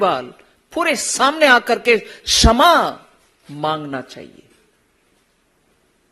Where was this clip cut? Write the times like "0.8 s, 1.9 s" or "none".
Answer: none